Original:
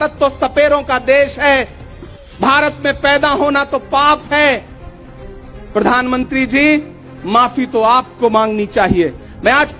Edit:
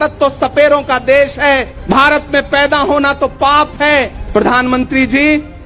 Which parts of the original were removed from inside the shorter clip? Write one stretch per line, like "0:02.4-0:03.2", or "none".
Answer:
0:01.7-0:02.3
0:04.7-0:05.6